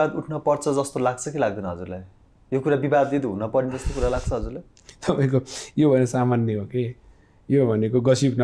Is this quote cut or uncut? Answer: uncut